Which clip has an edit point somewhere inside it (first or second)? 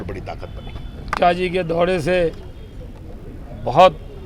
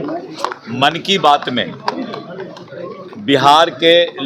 first